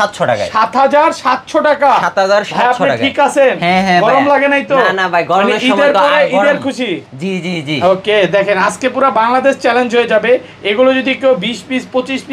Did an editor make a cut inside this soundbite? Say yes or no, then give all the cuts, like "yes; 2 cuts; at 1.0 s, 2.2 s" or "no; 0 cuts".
no; 0 cuts